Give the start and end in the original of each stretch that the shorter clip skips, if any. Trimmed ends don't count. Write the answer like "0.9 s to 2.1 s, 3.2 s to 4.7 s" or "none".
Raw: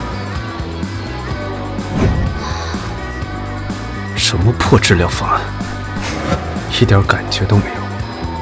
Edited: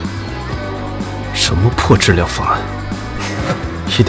1.9 s to 4.0 s